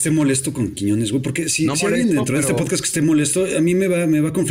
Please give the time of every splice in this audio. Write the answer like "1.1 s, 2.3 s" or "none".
none